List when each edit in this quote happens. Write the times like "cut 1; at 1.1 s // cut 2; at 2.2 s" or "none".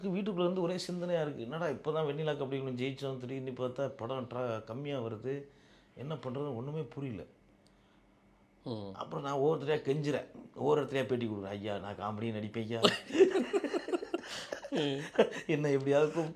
none